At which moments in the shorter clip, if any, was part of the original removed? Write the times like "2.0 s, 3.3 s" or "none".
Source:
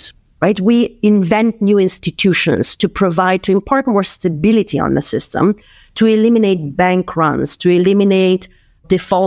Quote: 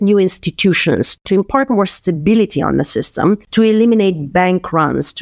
1.2 s, 3.4 s

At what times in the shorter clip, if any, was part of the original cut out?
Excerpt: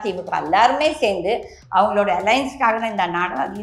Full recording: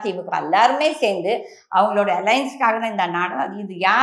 none

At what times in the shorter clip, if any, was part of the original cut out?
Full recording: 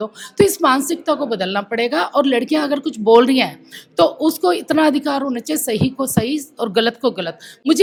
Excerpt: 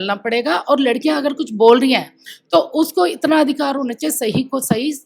none

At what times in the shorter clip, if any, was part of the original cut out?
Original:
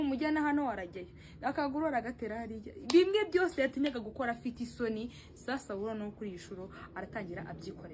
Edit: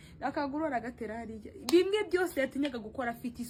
none

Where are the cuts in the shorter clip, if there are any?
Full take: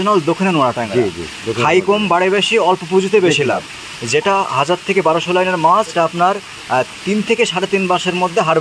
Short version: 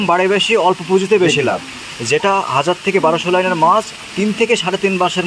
3.9 s

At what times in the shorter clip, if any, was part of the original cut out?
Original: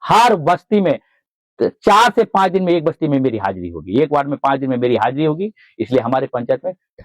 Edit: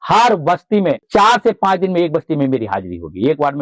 1.0 s

